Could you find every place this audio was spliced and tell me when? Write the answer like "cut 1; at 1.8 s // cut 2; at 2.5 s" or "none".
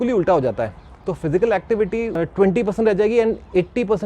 cut 1; at 2.1 s

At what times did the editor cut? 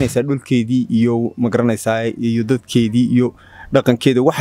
none

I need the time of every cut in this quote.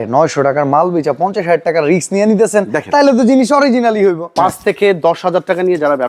cut 1; at 4.3 s

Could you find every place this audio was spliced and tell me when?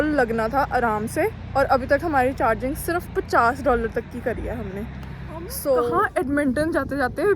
cut 1; at 5.9 s

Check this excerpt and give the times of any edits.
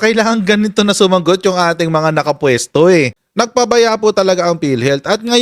cut 1; at 3.1 s

